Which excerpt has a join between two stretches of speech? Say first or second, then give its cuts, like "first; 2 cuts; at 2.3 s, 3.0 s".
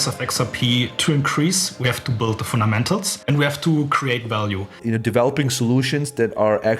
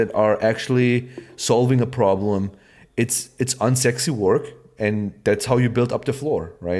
first; 3 cuts; at 1.0 s, 3.1 s, 4.7 s